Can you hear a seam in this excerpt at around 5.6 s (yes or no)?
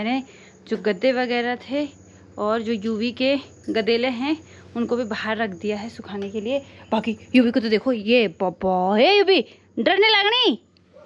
no